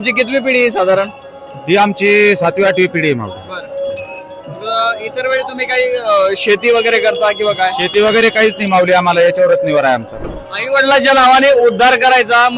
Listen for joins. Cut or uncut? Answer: cut